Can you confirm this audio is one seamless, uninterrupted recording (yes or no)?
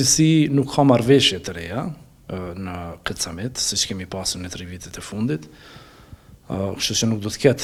yes